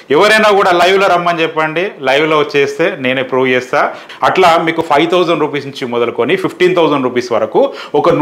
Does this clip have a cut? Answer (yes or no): yes